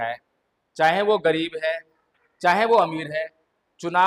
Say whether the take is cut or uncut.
uncut